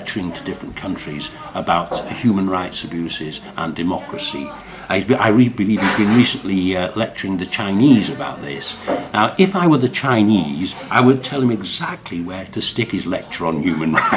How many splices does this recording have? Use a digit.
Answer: 0